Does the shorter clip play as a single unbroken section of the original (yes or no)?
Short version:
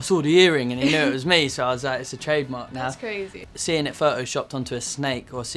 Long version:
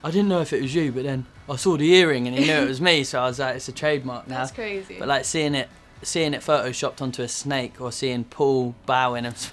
no